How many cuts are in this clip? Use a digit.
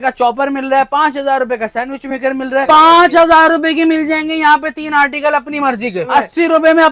2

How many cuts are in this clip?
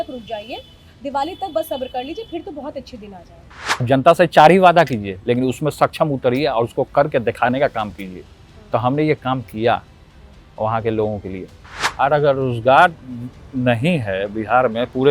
2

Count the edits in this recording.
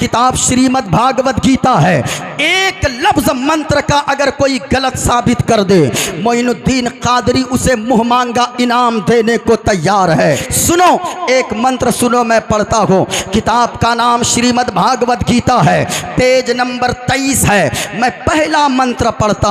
1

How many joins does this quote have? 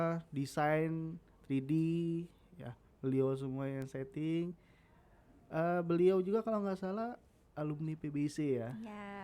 0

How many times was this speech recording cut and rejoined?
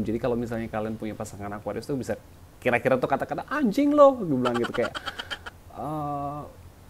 0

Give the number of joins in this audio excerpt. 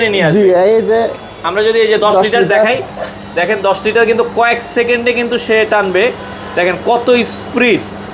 0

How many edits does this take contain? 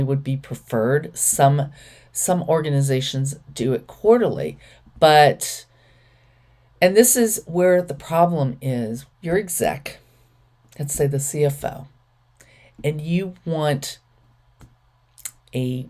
1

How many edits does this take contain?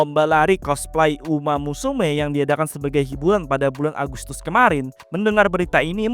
1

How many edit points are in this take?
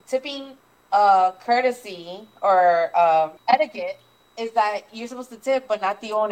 1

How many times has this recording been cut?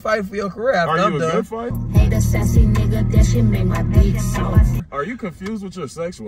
2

